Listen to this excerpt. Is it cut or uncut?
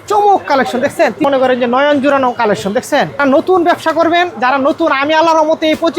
cut